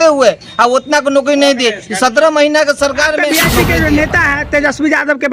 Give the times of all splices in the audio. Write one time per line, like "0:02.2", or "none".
0:03.3